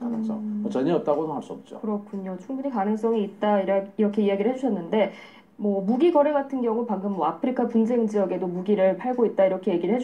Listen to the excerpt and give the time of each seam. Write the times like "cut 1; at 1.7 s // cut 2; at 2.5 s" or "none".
none